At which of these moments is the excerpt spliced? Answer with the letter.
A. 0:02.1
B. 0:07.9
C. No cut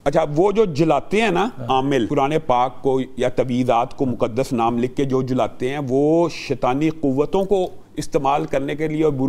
A